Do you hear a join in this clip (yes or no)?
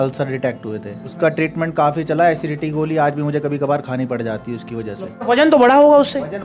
yes